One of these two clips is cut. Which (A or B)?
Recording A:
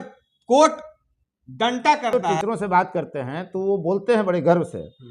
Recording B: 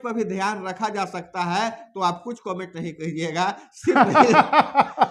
A